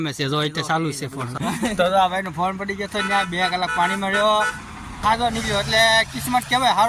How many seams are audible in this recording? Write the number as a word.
two